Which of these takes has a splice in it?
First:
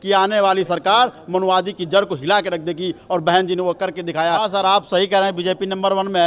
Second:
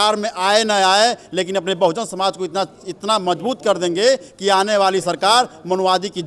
first; 1 cut; at 4.4 s

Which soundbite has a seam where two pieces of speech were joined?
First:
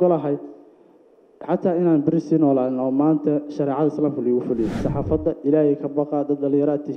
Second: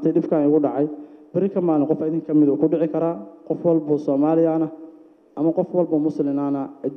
first; 1 cut; at 4.8 s

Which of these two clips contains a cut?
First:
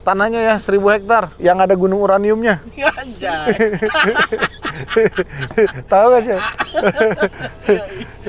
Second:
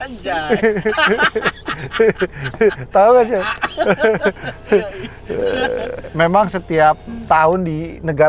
first; 1 cut; at 1.3 s

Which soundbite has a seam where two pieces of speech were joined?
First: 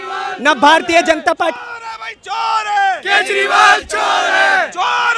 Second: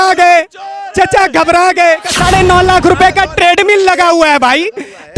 second; 1 cut; at 2.2 s

